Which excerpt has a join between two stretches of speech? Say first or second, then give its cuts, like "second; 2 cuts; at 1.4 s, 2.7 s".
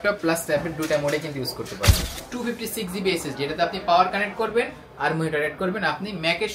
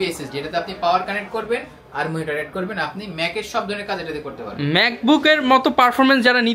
first; 1 cut; at 2.1 s